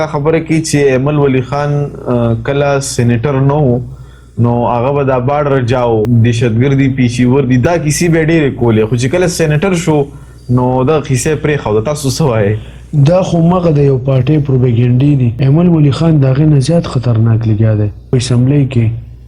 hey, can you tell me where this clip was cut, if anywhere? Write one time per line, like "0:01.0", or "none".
0:06.1
0:07.6
0:15.3
0:18.1